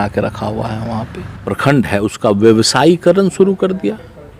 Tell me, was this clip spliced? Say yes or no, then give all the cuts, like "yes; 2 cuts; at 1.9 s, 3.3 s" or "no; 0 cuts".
yes; 1 cut; at 1.5 s